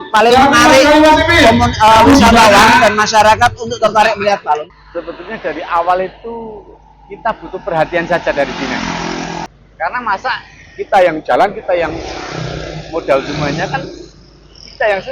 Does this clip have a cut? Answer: yes; 2 cuts; at 4.8 s, 9.5 s

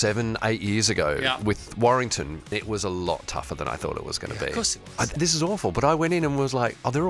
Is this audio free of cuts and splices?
no; 2 cuts; at 2.5 s, 5.1 s

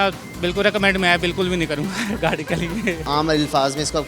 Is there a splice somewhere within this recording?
yes; 1 cut; at 3.0 s

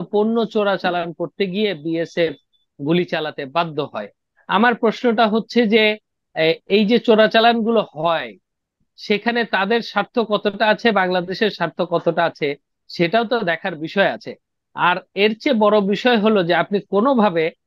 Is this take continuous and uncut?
yes; 0 cuts

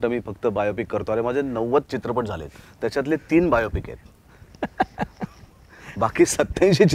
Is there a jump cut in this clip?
no; 0 cuts

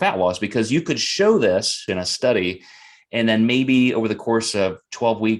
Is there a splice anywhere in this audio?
yes; 1 cut; at 1.9 s

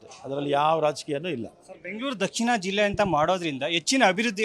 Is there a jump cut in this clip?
no; 0 cuts

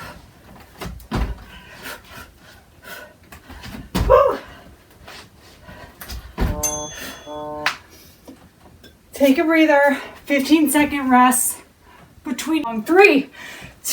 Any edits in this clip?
yes; 1 cut; at 12.8 s

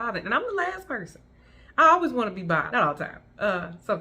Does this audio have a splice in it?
yes; 1 cut; at 2.7 s

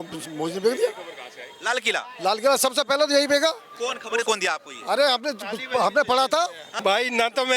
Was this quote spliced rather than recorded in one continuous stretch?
yes; 1 cut; at 6.7 s

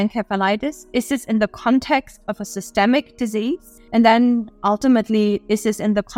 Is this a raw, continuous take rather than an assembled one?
no; 1 cut; at 3.7 s

